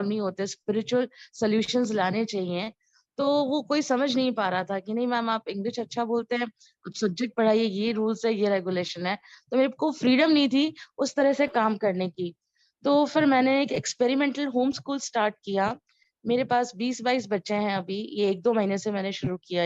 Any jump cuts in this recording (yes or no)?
no